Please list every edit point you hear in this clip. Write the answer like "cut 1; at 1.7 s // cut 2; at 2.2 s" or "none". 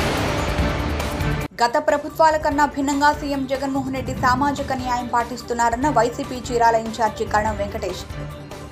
cut 1; at 1.0 s

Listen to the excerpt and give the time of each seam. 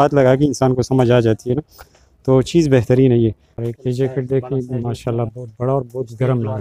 cut 1; at 3.5 s

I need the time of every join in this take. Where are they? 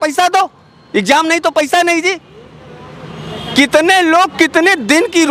none

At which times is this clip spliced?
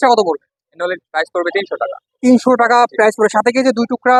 none

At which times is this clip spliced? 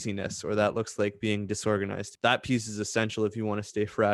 cut 1; at 2.1 s

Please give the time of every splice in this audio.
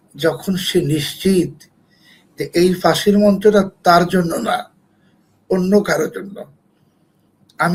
none

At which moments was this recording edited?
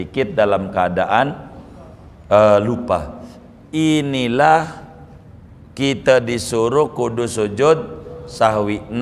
none

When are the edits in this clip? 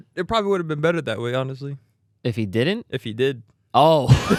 none

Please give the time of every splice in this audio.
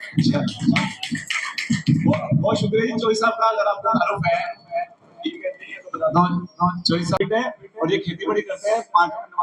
cut 1; at 7.2 s

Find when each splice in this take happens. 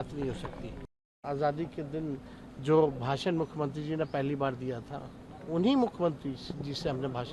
cut 1; at 1.2 s

